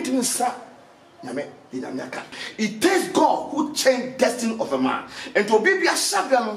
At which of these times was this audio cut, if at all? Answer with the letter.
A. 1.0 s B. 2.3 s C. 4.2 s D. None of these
B